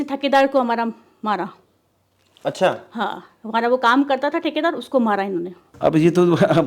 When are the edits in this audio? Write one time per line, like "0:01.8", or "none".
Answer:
0:05.6